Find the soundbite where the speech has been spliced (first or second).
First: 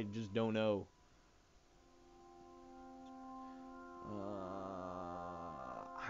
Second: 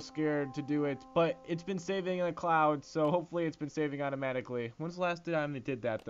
second